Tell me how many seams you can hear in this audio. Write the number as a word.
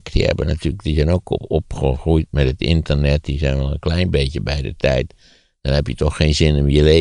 zero